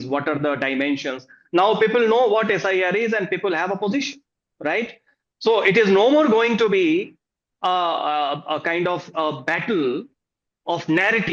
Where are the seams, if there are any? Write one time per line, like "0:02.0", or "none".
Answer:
none